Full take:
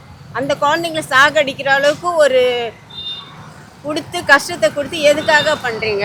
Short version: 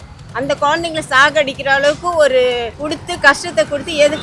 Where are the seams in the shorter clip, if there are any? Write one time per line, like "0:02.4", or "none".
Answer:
0:02.7